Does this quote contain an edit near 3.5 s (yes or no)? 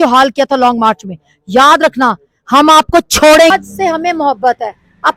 yes